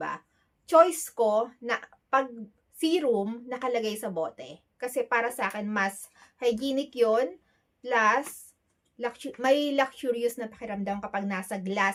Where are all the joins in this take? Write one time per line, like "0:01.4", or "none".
none